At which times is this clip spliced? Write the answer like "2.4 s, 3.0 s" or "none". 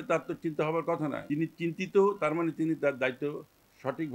1.2 s